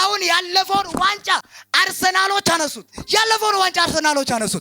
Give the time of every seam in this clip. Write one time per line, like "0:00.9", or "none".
none